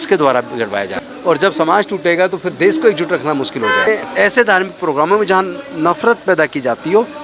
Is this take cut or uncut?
cut